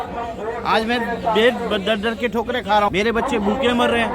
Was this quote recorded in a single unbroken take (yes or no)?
no